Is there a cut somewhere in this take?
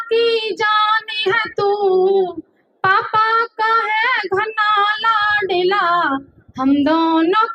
no; 0 cuts

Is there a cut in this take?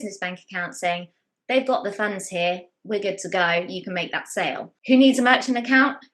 yes; 1 cut; at 4.7 s

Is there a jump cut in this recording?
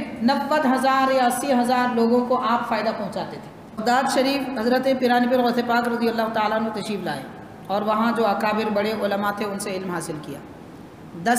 yes; 1 cut; at 3.8 s

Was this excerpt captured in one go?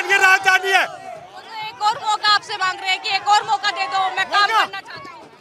yes; 0 cuts

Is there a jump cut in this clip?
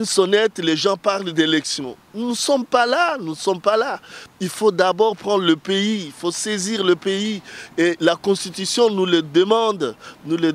no; 0 cuts

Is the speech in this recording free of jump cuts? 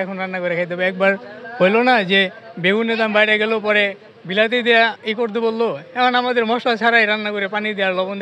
yes; 0 cuts

